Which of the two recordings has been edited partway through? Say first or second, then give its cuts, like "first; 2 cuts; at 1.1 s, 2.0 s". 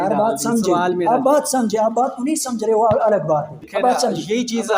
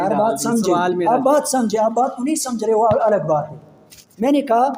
first; 1 cut; at 3.6 s